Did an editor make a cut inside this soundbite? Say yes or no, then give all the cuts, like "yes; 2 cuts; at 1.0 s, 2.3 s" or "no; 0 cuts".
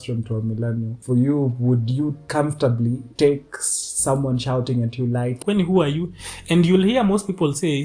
yes; 4 cuts; at 0.9 s, 2.2 s, 3.1 s, 5.4 s